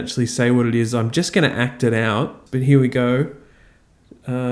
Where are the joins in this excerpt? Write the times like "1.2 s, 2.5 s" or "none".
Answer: 2.4 s